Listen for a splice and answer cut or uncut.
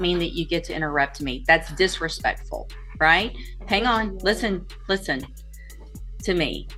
uncut